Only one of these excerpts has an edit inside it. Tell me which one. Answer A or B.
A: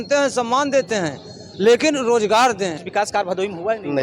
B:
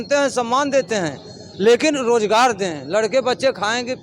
A